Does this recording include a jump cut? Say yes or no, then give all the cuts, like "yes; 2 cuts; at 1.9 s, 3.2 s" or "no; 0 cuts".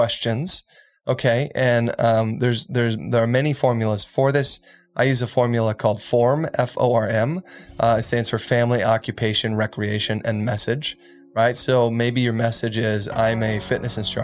no; 0 cuts